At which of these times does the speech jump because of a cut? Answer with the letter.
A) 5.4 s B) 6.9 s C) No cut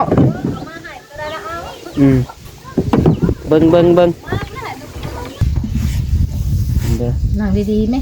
A